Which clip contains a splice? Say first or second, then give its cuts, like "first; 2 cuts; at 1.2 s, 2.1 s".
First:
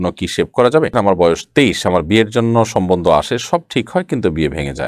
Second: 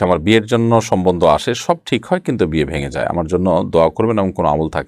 first; 1 cut; at 0.9 s